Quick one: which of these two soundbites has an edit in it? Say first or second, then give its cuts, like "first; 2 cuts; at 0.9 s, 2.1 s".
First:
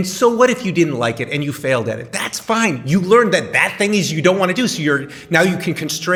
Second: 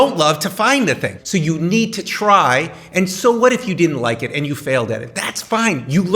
second; 1 cut; at 1.1 s